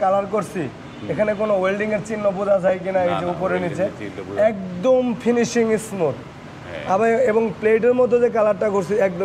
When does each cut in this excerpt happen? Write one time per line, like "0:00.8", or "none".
none